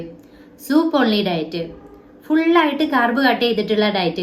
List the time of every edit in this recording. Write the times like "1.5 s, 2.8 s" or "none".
none